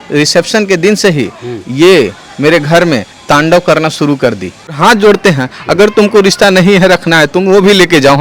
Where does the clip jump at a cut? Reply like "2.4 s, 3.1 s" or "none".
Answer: 4.8 s